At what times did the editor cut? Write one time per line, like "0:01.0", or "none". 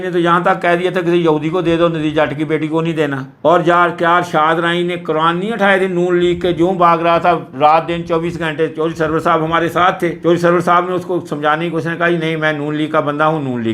none